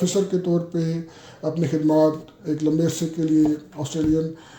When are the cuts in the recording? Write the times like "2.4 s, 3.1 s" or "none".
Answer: none